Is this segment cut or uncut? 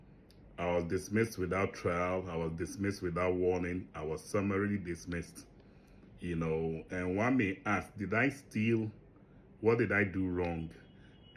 uncut